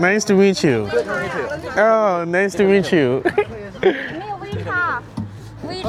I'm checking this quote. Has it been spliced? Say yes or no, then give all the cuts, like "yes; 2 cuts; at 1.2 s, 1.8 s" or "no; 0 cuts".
no; 0 cuts